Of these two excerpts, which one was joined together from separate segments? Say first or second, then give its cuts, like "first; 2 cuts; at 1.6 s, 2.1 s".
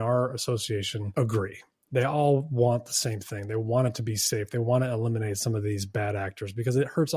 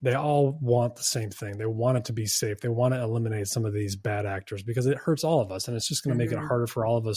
first; 1 cut; at 1.0 s